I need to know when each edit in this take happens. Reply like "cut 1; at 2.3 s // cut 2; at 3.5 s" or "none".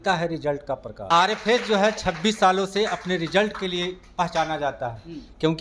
cut 1; at 1.0 s